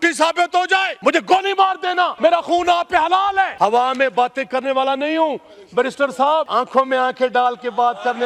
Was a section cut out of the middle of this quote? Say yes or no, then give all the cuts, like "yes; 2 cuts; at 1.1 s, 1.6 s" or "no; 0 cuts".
yes; 4 cuts; at 0.9 s, 2.1 s, 3.5 s, 6.5 s